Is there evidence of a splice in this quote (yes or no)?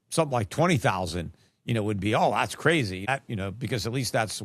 yes